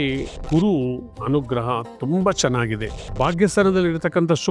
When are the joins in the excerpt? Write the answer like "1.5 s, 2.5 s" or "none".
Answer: 3.0 s